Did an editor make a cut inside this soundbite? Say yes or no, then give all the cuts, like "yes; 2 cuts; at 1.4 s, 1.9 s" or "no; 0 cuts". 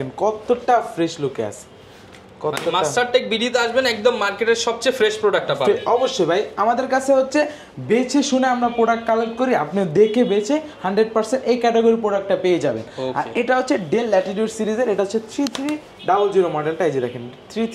no; 0 cuts